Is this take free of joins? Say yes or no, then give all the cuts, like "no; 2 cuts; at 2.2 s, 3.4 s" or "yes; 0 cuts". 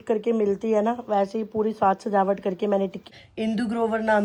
no; 1 cut; at 3.0 s